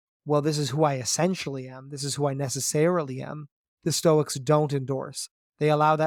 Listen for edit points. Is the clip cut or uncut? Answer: uncut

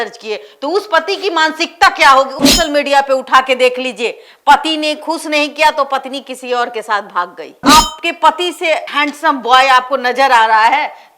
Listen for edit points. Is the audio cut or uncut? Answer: cut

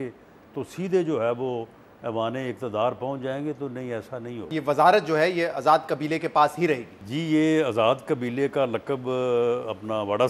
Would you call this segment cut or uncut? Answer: cut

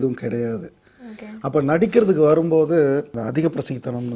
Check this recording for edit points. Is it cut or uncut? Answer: cut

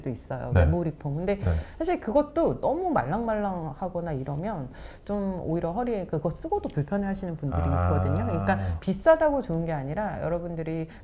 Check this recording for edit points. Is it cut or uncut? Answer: uncut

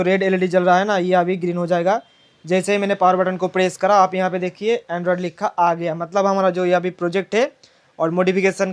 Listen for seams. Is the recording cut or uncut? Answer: uncut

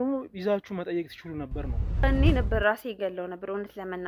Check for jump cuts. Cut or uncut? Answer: cut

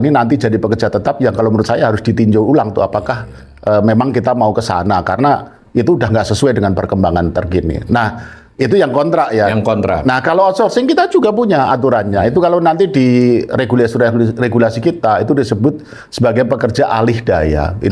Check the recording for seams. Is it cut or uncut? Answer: uncut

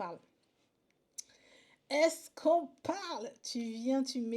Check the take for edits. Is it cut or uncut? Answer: uncut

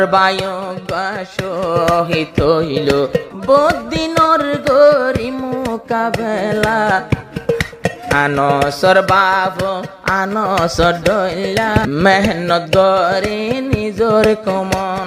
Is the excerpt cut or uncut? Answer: cut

